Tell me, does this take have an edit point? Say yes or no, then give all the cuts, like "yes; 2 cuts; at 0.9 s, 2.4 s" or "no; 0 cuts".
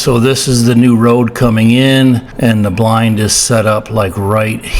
yes; 1 cut; at 2.3 s